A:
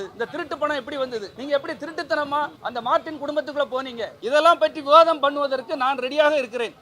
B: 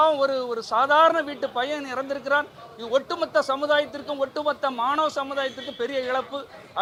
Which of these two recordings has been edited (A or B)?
A